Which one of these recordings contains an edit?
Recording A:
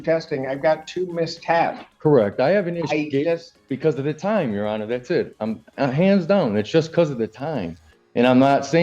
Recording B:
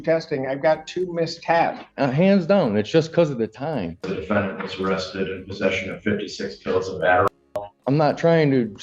B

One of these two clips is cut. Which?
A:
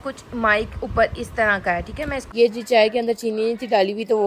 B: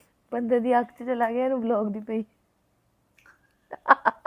A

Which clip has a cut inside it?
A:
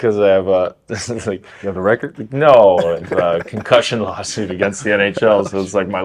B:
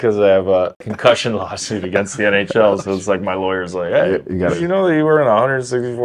B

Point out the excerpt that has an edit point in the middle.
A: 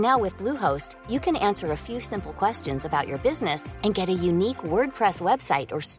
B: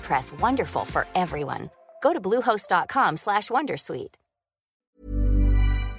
B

